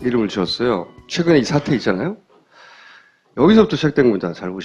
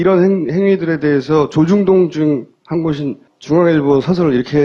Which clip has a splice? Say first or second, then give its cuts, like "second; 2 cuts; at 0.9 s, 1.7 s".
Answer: second; 1 cut; at 2.8 s